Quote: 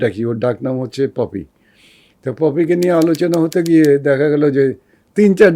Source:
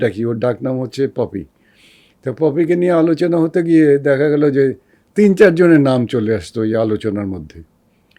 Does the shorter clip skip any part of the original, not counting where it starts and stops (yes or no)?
no